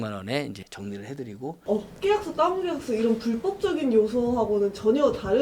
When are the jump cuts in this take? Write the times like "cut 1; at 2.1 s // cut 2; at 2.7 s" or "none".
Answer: cut 1; at 1.6 s